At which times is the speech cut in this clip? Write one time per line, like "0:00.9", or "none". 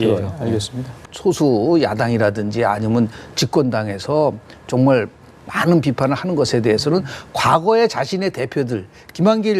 0:01.0